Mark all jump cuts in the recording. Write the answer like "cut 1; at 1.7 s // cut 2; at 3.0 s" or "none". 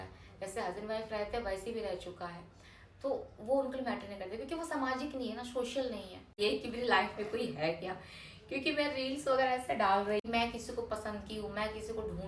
cut 1; at 6.4 s // cut 2; at 10.2 s